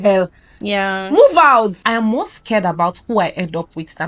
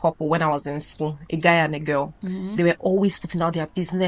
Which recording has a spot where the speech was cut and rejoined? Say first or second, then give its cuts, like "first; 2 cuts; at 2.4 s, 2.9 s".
first; 1 cut; at 1.8 s